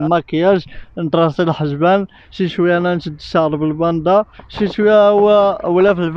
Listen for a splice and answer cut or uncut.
uncut